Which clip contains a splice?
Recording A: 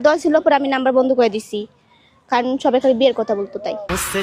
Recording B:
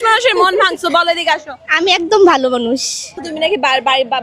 B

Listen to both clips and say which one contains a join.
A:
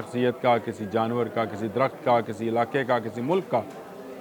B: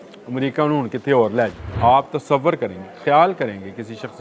B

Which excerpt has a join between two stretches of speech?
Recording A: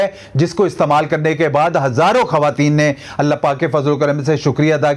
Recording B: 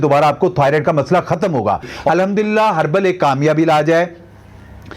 B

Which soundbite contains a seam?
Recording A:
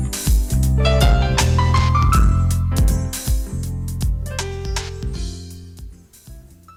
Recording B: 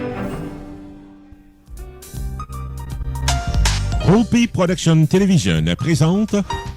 B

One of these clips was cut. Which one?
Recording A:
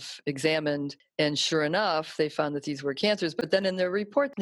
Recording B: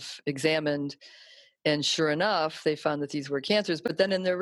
A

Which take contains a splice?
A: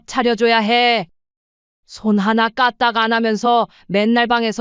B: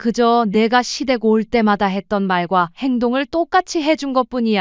A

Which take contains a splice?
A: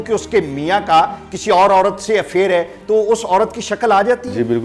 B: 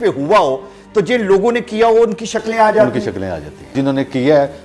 B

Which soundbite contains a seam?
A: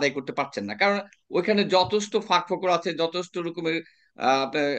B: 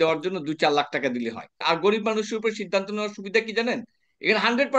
B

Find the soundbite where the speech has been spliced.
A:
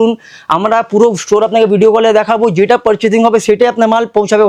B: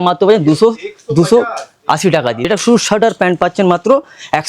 B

